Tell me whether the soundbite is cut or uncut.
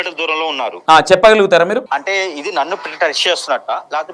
cut